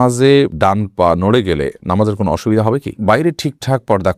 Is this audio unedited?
no; 1 cut; at 3.0 s

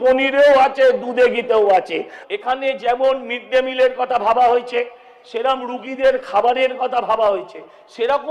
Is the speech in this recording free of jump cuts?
no; 1 cut; at 2.0 s

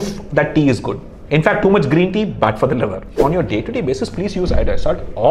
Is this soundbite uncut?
no; 1 cut; at 3.1 s

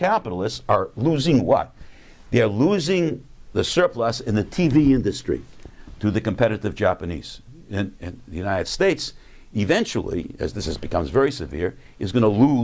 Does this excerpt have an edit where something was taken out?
yes; 1 cut; at 6.1 s

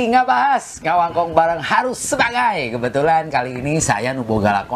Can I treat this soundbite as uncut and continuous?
yes; 0 cuts

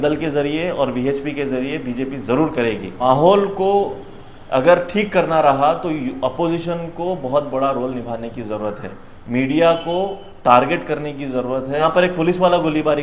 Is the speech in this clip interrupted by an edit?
yes; 2 cuts; at 3.0 s, 11.8 s

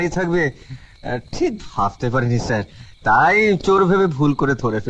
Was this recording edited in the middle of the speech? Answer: no; 0 cuts

